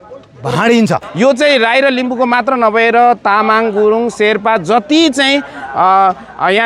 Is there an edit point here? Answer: yes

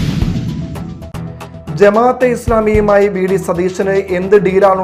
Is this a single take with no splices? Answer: yes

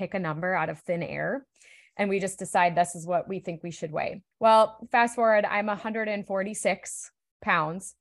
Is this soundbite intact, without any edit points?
no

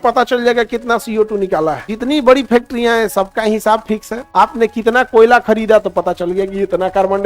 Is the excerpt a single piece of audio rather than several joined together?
no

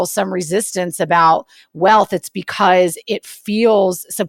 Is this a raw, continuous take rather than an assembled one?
yes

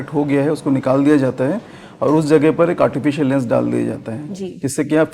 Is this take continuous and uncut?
yes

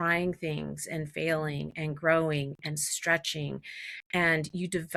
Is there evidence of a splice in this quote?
no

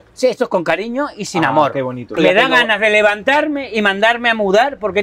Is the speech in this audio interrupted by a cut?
yes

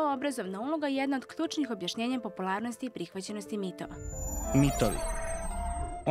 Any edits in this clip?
yes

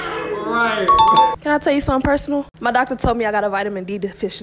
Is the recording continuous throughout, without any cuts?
no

